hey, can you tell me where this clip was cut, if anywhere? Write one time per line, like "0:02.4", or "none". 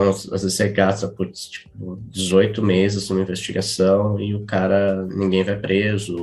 none